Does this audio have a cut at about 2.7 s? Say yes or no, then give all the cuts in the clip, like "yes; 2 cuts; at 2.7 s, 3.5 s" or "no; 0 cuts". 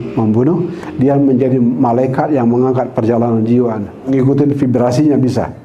no; 1 cut; at 4.1 s